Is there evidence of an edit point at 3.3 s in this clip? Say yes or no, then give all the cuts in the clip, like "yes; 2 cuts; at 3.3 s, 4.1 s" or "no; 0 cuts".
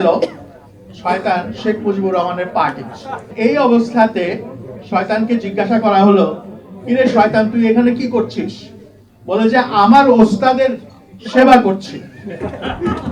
yes; 1 cut; at 3.3 s